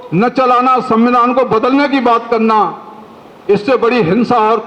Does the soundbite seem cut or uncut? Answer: uncut